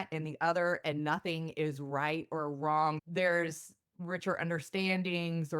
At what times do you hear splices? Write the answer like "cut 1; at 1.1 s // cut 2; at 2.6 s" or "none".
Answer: cut 1; at 3.0 s